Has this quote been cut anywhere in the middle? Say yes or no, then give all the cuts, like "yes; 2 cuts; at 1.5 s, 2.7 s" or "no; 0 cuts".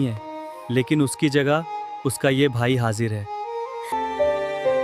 yes; 1 cut; at 3.9 s